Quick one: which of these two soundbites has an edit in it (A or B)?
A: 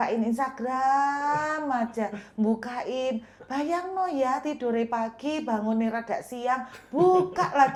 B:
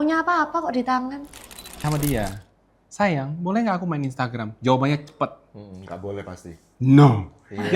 B